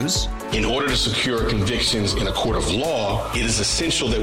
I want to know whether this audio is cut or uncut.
uncut